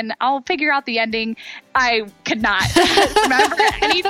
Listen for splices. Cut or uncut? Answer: cut